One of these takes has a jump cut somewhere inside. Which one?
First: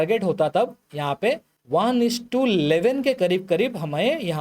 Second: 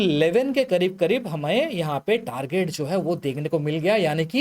first; 1 cut; at 1.5 s

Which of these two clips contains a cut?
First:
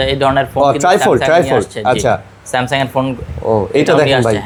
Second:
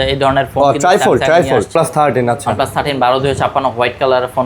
second; 1 cut; at 1.7 s

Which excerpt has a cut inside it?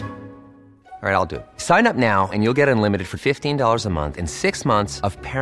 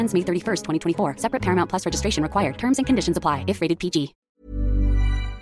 second; 1 cut; at 4.3 s

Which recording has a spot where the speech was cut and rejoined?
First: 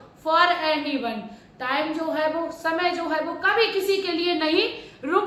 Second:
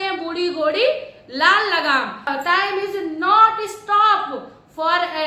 second; 1 cut; at 2.3 s

